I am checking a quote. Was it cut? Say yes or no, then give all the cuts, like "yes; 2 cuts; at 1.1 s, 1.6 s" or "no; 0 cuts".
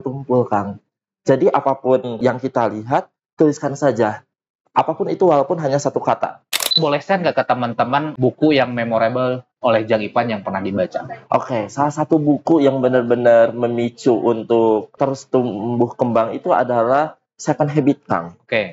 yes; 5 cuts; at 2.2 s, 6.8 s, 8.1 s, 9.5 s, 14.9 s